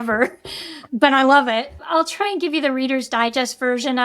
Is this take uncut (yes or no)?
no